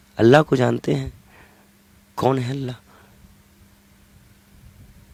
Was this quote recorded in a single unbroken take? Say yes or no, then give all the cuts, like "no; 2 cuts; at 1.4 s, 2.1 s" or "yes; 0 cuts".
yes; 0 cuts